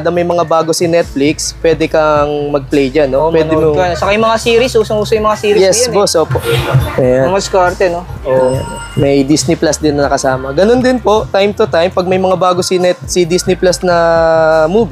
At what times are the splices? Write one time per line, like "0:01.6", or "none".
0:06.4